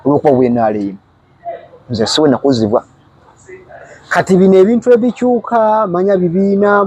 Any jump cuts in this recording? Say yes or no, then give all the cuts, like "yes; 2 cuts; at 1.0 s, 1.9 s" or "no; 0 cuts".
no; 0 cuts